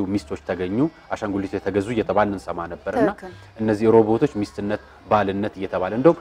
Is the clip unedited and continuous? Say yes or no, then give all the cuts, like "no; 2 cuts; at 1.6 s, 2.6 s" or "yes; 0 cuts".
yes; 0 cuts